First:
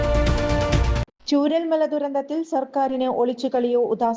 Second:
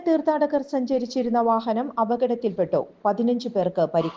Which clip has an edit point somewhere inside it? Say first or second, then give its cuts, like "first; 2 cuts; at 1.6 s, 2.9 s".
first; 1 cut; at 1.1 s